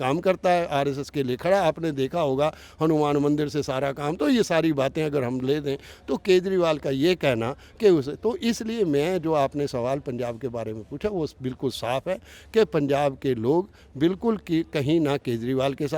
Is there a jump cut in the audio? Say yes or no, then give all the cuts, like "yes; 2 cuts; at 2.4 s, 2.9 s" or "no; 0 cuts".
no; 0 cuts